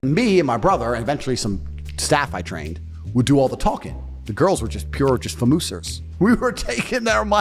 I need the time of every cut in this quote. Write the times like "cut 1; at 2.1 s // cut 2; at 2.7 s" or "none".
none